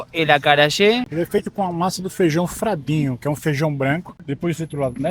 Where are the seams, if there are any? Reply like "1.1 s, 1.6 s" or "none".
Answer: 1.1 s, 4.1 s